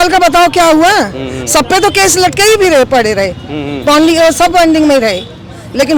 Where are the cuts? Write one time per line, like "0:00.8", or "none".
none